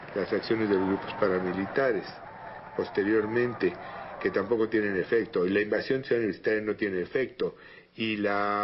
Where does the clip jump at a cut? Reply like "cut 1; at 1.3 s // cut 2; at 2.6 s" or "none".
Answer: cut 1; at 5.0 s